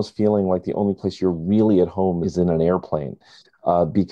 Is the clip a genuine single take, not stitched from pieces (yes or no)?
no